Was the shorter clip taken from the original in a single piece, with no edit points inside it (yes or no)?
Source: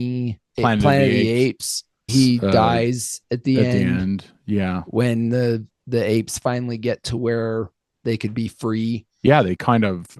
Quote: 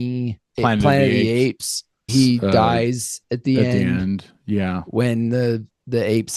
yes